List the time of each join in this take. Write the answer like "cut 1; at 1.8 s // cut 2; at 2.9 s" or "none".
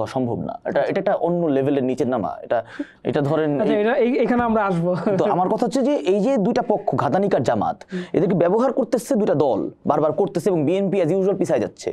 none